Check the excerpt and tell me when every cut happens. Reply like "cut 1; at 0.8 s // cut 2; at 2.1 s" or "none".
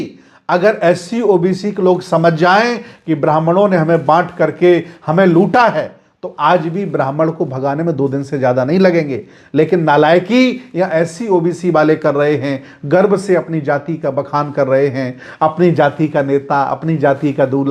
none

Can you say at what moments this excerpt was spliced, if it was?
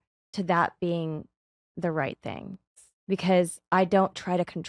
cut 1; at 2.7 s

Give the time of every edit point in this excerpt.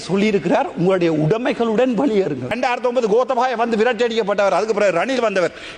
cut 1; at 2.6 s

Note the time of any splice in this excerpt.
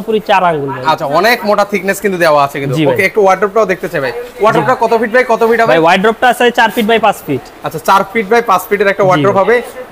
none

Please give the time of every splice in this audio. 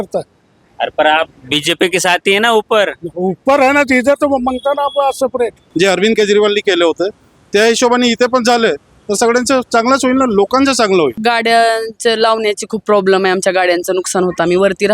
cut 1; at 5.6 s // cut 2; at 11.2 s

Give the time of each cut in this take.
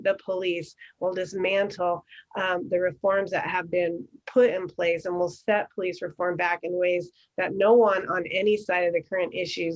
none

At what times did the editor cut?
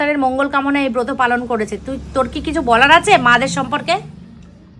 none

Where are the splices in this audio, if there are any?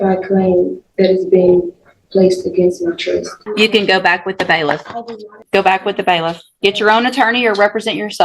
cut 1; at 3.4 s // cut 2; at 5.4 s

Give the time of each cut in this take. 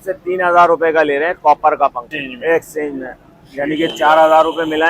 cut 1; at 2.1 s

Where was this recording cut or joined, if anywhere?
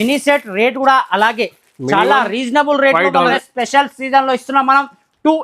cut 1; at 3.3 s

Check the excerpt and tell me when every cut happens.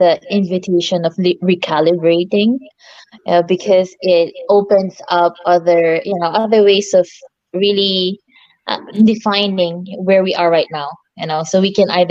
none

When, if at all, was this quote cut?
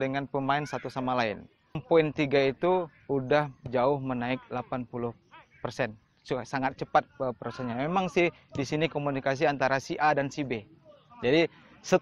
cut 1; at 1.8 s

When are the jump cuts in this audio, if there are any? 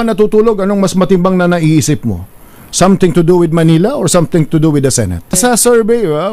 cut 1; at 5.4 s

